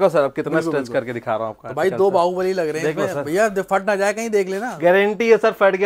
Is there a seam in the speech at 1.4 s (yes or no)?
no